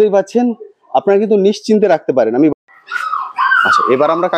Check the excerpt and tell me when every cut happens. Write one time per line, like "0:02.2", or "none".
0:02.5